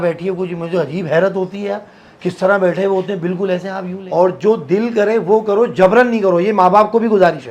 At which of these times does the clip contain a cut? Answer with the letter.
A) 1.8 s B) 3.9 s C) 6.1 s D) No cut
B